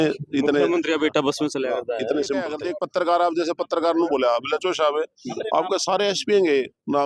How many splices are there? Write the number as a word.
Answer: one